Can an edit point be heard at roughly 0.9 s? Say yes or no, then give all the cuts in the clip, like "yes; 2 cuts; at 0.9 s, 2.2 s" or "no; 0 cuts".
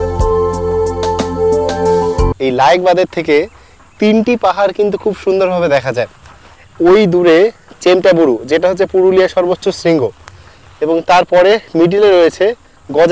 no; 1 cut; at 2.3 s